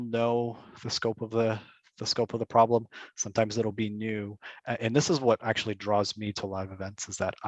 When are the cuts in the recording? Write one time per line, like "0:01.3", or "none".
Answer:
none